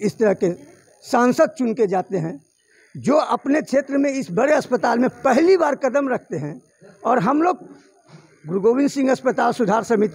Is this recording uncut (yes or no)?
yes